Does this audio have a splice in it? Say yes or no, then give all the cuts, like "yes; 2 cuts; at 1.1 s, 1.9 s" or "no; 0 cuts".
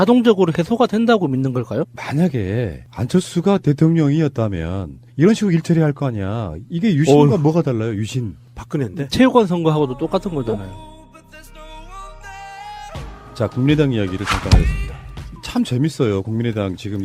yes; 2 cuts; at 1.9 s, 10.7 s